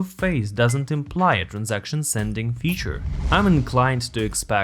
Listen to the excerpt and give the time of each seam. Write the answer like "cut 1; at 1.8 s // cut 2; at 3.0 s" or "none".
cut 1; at 3.1 s